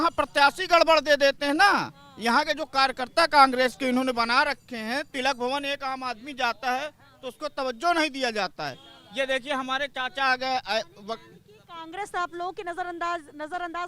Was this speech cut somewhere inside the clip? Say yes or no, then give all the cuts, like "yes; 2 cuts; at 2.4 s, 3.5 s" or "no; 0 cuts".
no; 0 cuts